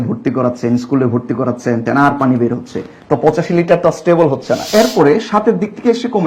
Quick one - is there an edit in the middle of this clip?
yes; 2 cuts; at 1.8 s, 4.6 s

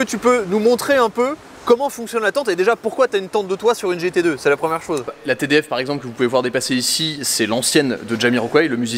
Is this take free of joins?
no; 1 cut; at 5.1 s

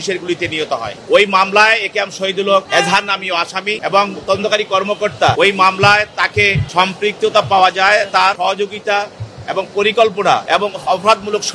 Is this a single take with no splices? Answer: no; 7 cuts; at 0.9 s, 2.7 s, 3.8 s, 5.4 s, 6.6 s, 8.4 s, 10.4 s

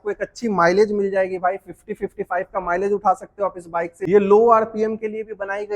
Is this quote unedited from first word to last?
no; 1 cut; at 4.0 s

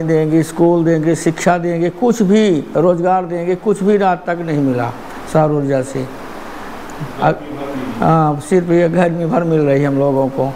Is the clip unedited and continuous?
yes; 0 cuts

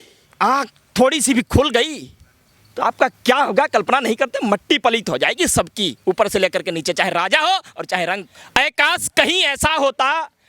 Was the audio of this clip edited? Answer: yes; 1 cut; at 8.3 s

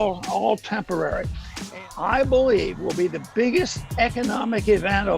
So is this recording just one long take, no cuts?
no; 1 cut; at 1.3 s

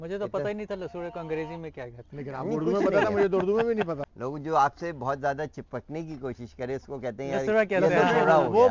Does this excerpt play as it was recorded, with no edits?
no; 1 cut; at 4.1 s

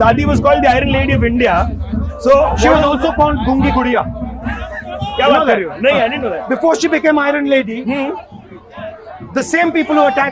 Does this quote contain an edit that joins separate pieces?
no; 0 cuts

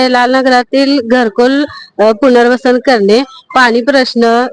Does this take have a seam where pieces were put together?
no; 0 cuts

